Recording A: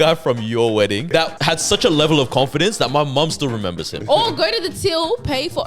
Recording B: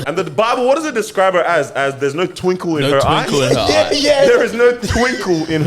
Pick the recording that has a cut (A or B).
A